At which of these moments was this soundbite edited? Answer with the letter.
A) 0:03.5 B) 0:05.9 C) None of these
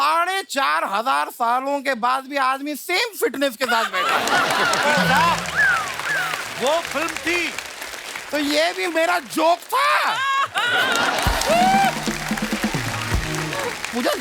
C